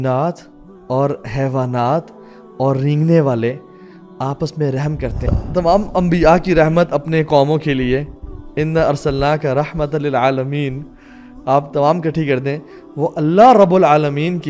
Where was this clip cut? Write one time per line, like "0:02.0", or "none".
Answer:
0:05.3